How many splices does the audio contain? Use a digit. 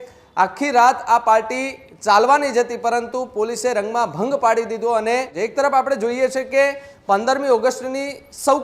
1